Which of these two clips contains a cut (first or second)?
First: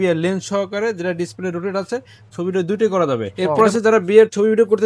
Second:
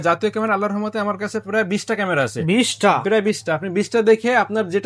first